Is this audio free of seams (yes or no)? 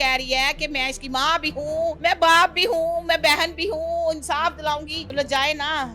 no